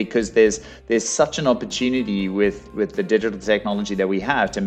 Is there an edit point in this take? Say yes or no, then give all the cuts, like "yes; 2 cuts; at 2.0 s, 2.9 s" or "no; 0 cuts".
no; 0 cuts